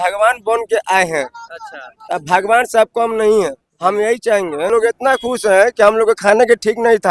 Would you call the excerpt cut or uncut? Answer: cut